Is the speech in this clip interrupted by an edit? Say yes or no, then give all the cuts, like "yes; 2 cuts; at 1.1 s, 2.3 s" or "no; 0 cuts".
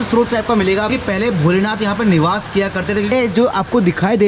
yes; 2 cuts; at 0.9 s, 3.1 s